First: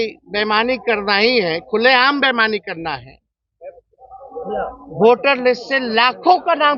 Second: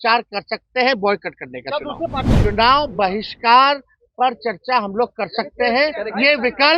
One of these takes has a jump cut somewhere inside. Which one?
second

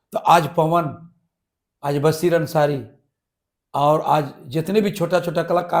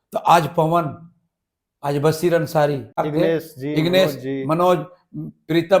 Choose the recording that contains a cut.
second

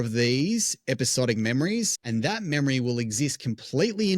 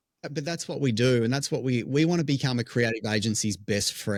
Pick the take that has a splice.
first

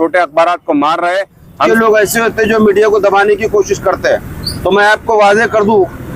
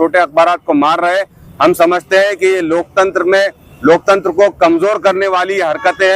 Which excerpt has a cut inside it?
first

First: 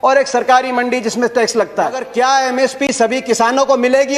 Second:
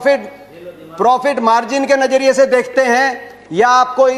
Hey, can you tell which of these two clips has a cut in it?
first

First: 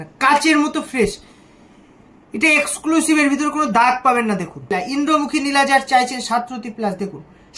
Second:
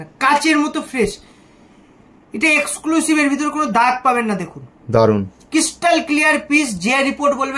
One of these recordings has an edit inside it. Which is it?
first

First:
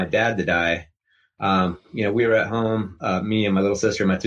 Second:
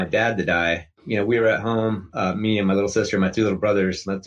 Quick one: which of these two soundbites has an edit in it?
second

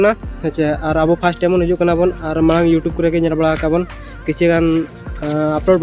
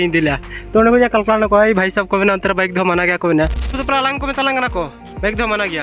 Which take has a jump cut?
second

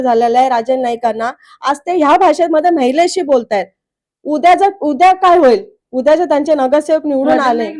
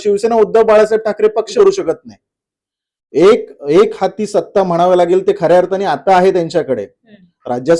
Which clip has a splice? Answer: second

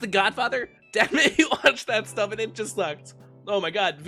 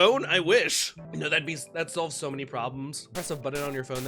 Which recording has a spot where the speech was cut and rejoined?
second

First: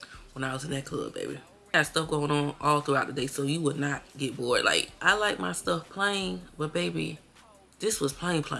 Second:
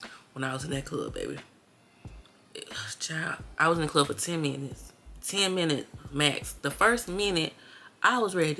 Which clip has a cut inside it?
first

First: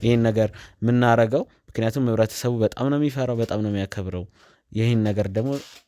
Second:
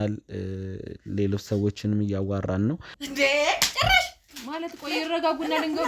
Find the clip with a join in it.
second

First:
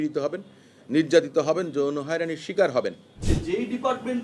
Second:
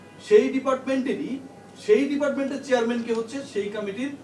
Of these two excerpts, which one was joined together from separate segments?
first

